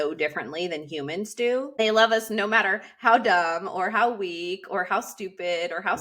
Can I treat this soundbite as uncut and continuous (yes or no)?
no